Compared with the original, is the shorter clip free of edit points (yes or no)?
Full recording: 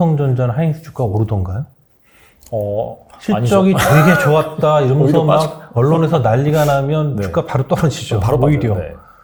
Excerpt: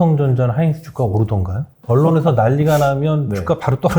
no